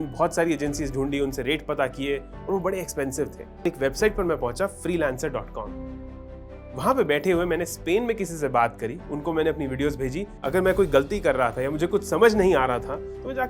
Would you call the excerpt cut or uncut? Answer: cut